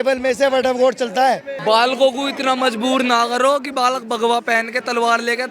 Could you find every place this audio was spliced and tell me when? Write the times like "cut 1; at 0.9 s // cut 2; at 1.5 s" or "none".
cut 1; at 1.5 s